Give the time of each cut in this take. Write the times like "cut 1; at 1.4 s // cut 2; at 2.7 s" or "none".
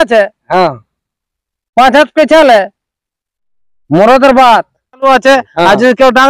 cut 1; at 5.1 s